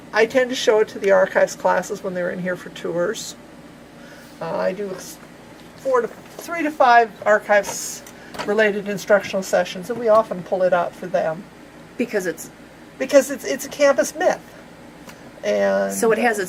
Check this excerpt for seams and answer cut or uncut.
uncut